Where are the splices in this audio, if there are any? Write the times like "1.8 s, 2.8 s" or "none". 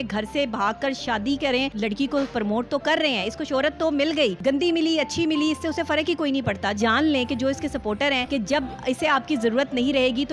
1.7 s, 4.4 s, 6.8 s, 8.2 s